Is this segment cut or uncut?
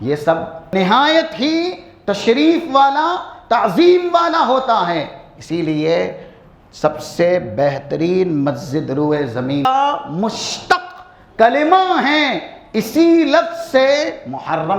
cut